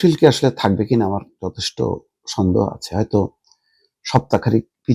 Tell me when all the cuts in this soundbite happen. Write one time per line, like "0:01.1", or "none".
none